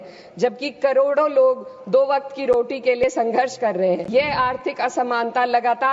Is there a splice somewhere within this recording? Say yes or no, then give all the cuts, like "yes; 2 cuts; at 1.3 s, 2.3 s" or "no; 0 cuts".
yes; 1 cut; at 4.0 s